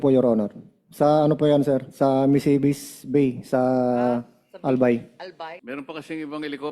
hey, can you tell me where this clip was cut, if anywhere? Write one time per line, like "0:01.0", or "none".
0:05.6